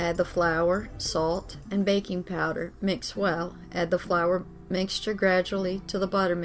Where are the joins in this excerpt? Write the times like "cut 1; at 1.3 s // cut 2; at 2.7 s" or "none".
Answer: none